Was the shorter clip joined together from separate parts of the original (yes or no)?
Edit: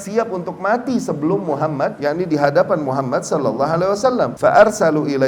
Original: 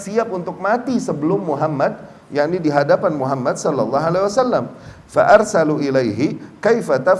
yes